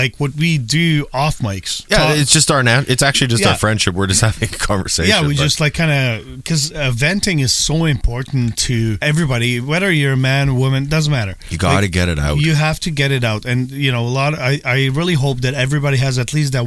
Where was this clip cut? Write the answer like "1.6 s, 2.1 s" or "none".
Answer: 1.7 s, 9.0 s